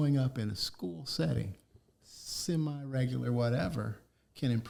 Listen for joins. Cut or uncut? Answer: uncut